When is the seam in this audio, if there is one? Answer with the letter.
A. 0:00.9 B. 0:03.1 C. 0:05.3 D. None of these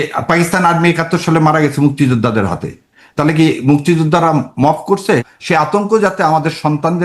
C